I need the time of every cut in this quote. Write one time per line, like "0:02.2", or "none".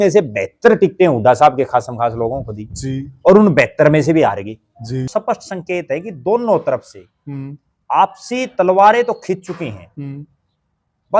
0:05.1